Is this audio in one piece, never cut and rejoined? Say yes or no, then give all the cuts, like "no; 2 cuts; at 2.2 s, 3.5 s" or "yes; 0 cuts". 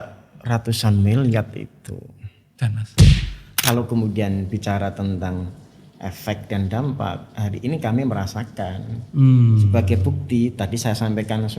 no; 1 cut; at 3.6 s